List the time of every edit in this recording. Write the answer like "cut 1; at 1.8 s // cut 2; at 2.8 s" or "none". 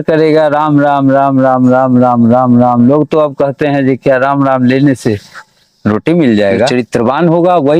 cut 1; at 6.7 s